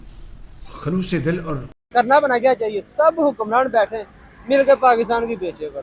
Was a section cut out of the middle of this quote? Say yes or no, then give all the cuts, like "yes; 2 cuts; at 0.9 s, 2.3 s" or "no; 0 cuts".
yes; 1 cut; at 1.8 s